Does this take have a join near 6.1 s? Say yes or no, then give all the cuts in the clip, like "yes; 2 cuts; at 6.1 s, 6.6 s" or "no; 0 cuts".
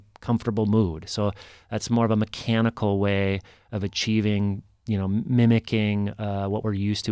no; 0 cuts